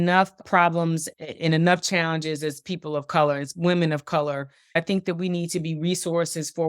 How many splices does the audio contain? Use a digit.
2